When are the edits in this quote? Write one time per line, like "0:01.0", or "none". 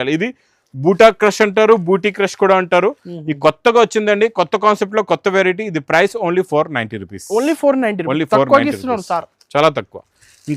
none